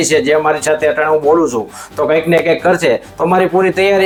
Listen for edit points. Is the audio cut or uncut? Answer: uncut